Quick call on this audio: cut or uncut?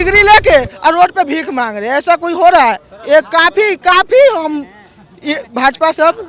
uncut